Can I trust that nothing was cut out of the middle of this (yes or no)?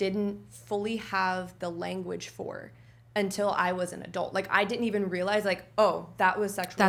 yes